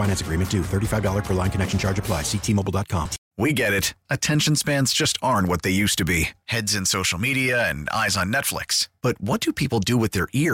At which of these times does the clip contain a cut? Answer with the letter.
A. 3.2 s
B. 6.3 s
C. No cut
A